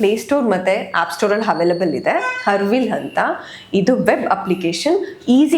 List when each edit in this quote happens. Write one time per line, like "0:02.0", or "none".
none